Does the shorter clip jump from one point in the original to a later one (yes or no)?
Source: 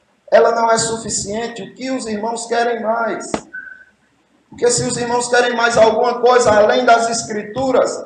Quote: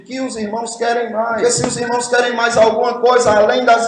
yes